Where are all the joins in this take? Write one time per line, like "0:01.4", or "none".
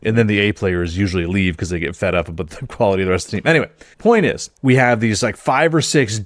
0:03.8
0:04.5